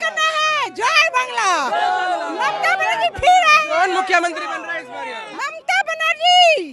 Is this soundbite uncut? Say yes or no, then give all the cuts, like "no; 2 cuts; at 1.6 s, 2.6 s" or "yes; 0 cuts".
no; 1 cut; at 5.3 s